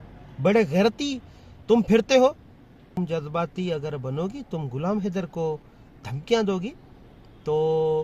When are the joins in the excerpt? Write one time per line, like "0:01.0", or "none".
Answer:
0:02.8